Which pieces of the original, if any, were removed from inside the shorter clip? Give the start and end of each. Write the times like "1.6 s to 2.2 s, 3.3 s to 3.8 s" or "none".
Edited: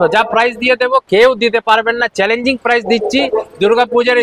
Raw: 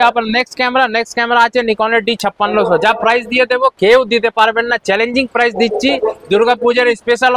none